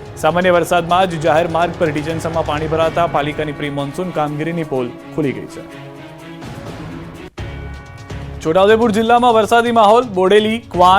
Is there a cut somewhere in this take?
yes; 1 cut; at 8.6 s

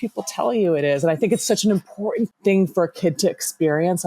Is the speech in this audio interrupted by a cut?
yes; 1 cut; at 2.3 s

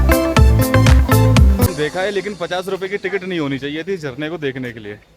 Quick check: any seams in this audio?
yes; 1 cut; at 1.7 s

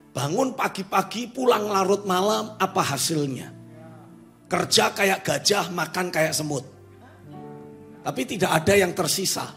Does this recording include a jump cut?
no; 0 cuts

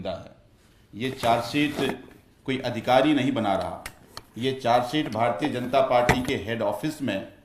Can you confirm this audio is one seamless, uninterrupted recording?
yes; 0 cuts

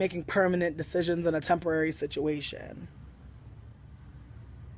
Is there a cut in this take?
no; 0 cuts

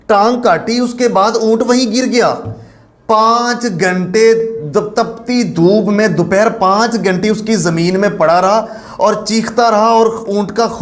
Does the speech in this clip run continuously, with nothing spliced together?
yes; 0 cuts

